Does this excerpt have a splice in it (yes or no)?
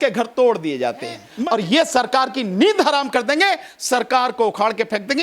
yes